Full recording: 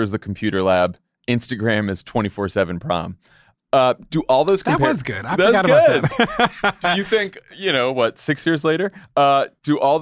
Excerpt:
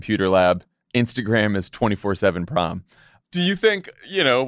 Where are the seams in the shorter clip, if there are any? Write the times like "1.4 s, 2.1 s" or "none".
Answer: 3.3 s